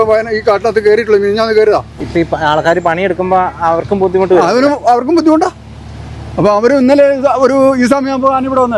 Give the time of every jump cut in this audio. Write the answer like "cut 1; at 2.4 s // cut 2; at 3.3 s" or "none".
cut 1; at 2.0 s